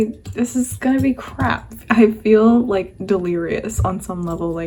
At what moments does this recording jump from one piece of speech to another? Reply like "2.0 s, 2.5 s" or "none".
none

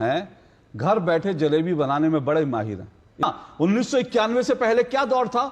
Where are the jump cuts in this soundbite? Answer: 3.2 s

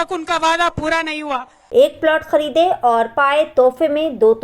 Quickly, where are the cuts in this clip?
1.7 s

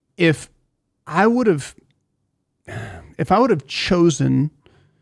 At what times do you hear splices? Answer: none

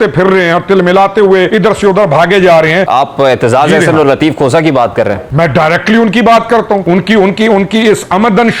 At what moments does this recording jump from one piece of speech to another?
1.5 s, 2.9 s, 5.2 s, 6.8 s

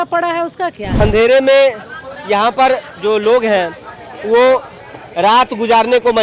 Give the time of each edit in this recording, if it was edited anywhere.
0.9 s

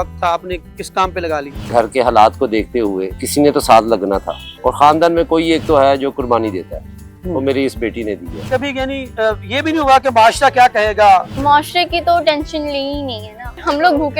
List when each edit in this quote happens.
1.6 s, 8.3 s, 11.3 s

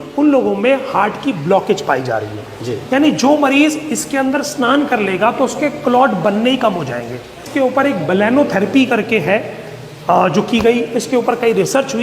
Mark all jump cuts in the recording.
7.4 s

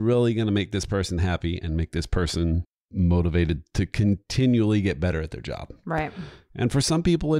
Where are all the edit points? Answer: 2.8 s

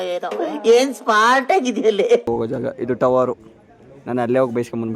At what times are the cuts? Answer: 2.3 s

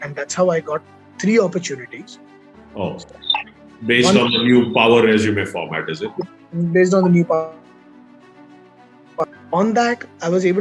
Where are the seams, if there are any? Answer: none

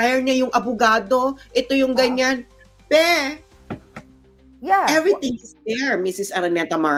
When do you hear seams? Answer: none

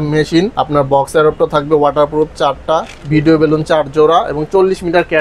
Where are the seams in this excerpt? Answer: none

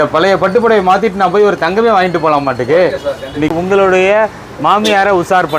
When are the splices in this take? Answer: 3.5 s

